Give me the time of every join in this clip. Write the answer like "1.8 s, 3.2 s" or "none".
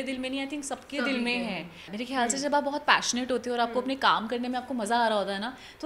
1.9 s